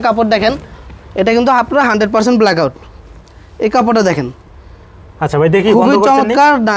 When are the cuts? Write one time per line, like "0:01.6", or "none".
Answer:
none